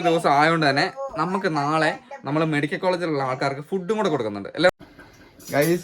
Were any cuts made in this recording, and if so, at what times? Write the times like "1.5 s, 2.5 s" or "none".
4.7 s